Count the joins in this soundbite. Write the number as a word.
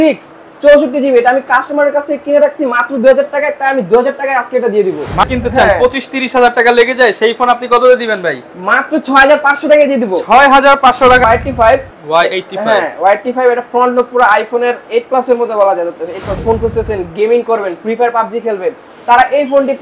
three